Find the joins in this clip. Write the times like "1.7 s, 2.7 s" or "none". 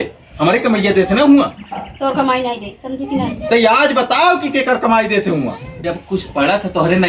5.7 s